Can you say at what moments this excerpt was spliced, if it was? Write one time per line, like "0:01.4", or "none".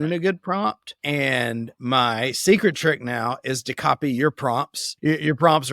0:00.9
0:04.8

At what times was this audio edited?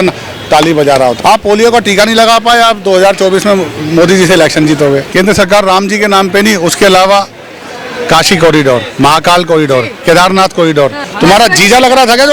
0:01.2
0:05.1
0:11.0

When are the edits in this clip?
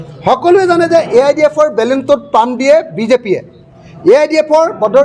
none

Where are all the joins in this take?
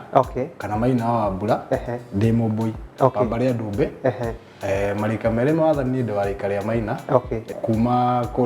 0:07.5

